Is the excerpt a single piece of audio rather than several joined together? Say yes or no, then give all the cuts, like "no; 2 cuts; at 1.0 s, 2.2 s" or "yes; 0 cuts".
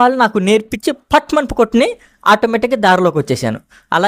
yes; 0 cuts